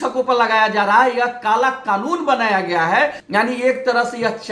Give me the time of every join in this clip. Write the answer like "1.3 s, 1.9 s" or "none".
3.2 s